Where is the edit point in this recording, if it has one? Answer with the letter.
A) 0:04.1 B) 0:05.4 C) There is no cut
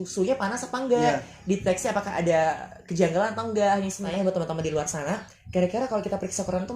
A